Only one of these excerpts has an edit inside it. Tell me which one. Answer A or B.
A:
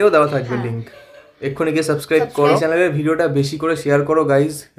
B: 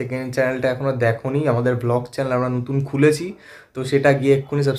A